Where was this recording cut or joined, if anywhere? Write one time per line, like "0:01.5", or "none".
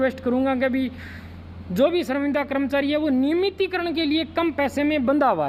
none